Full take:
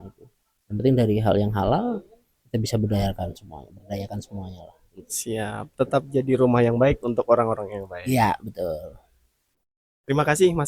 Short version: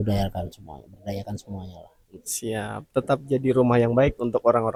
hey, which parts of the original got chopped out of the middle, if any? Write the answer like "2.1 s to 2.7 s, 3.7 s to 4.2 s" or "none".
none